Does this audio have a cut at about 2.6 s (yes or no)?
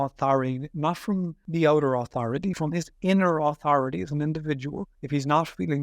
yes